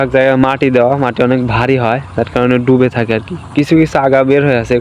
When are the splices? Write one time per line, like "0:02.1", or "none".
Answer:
none